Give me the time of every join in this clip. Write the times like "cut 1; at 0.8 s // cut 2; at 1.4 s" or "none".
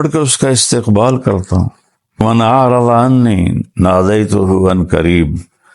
cut 1; at 2.2 s

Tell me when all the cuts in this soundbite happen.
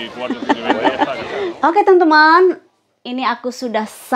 cut 1; at 1.2 s

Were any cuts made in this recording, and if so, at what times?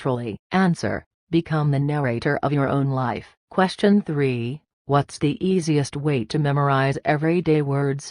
cut 1; at 3.4 s

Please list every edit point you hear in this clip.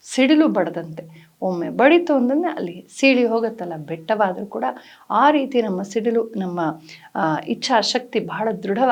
none

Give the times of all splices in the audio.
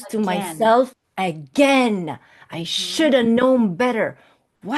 none

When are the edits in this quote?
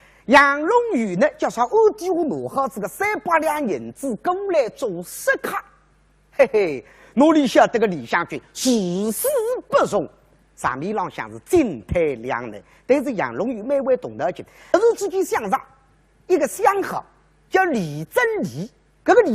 none

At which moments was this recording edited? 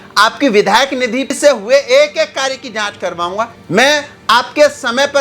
cut 1; at 1.4 s // cut 2; at 3.6 s

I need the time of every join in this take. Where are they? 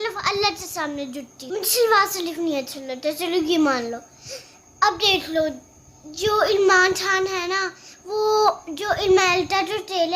cut 1; at 1.3 s

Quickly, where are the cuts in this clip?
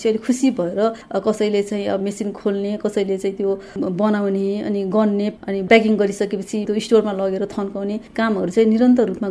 cut 1; at 1.0 s // cut 2; at 2.0 s // cut 3; at 5.3 s // cut 4; at 6.7 s

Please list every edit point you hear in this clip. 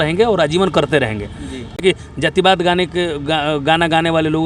cut 1; at 1.8 s

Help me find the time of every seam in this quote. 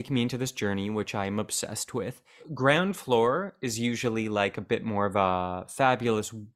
cut 1; at 2.5 s

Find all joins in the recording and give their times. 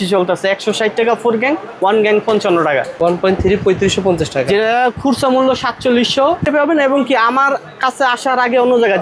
cut 1; at 3.0 s // cut 2; at 6.4 s

